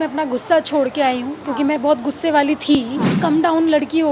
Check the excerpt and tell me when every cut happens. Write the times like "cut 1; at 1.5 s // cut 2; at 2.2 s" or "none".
cut 1; at 3.1 s

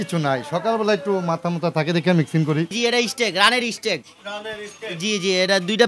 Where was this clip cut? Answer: cut 1; at 2.7 s

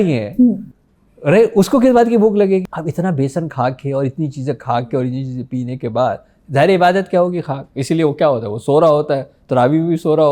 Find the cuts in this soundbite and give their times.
cut 1; at 2.7 s

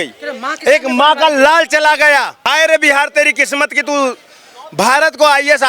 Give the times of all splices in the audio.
cut 1; at 2.4 s

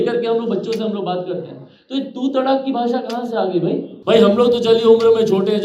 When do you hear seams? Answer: cut 1; at 3.9 s

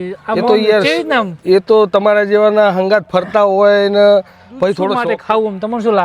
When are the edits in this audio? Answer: cut 1; at 5.0 s

